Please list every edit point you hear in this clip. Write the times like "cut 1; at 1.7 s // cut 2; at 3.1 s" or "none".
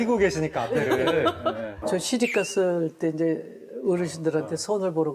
cut 1; at 1.8 s